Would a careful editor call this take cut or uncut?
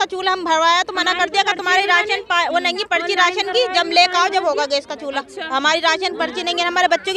uncut